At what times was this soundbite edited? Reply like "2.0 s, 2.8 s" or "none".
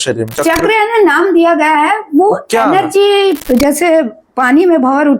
3.4 s

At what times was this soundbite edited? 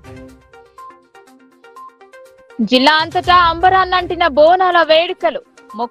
1.1 s, 2.4 s

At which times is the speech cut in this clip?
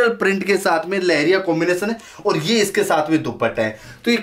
none

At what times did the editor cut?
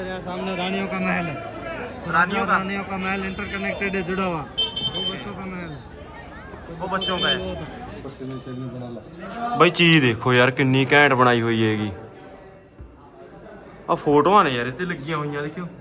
8.0 s

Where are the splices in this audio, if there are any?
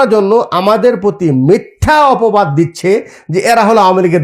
none

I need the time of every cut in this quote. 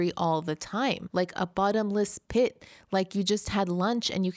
1.0 s

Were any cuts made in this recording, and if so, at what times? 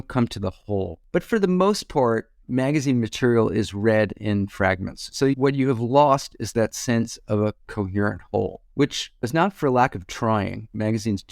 1.0 s

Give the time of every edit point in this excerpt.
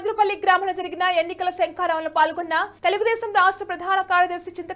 none

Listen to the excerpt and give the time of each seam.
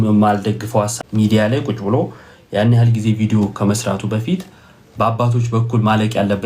0.9 s

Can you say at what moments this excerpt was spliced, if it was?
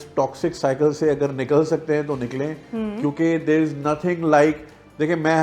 none

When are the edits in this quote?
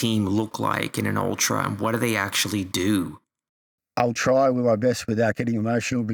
none

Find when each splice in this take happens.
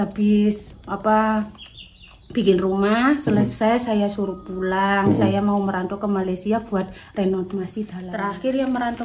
7.9 s

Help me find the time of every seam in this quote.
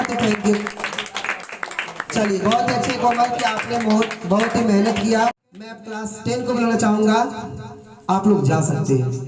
5.7 s

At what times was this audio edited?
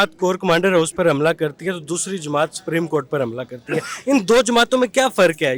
none

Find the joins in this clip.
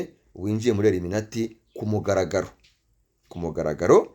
none

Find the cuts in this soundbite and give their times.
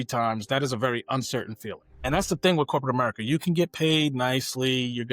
1.9 s

